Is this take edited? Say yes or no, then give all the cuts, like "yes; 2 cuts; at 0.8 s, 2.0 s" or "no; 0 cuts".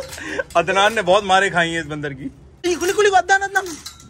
yes; 1 cut; at 2.7 s